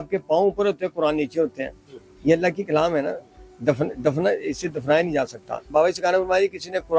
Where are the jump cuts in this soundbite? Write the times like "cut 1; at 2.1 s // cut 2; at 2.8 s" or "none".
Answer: cut 1; at 5.7 s